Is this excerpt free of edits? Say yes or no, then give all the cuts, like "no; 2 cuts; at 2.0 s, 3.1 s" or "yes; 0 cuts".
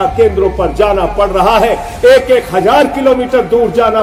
yes; 0 cuts